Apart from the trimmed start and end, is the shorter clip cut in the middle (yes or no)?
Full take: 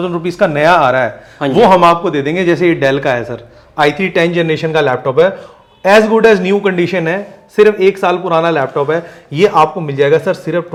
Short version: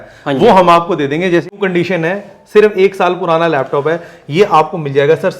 yes